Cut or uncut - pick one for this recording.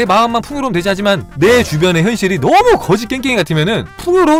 uncut